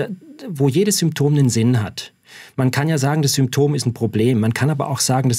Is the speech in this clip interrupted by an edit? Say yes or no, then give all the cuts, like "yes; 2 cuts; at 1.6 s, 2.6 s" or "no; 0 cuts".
no; 0 cuts